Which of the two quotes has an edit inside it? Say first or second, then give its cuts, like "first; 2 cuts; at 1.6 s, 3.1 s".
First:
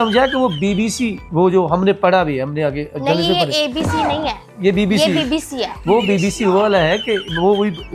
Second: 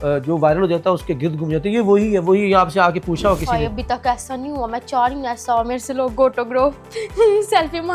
first; 1 cut; at 1.2 s